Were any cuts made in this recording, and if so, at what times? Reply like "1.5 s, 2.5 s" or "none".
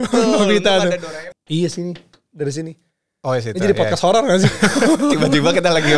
1.0 s

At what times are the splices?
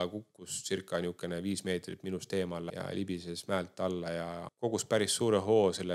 2.7 s, 4.5 s

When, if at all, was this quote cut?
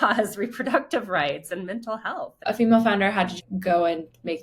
2.4 s, 3.4 s

